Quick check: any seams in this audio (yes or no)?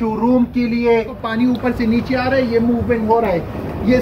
yes